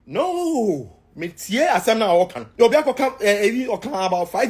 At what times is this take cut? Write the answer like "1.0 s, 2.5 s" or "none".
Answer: 2.4 s